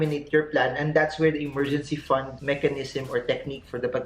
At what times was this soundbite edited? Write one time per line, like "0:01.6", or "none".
0:02.3